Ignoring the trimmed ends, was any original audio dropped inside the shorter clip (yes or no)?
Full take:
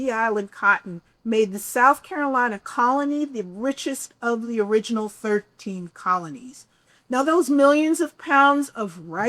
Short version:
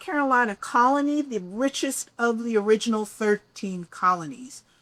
no